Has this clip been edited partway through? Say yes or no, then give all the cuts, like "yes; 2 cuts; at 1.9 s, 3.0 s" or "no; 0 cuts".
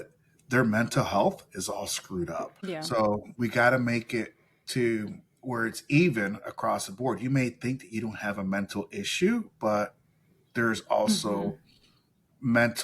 yes; 1 cut; at 2.6 s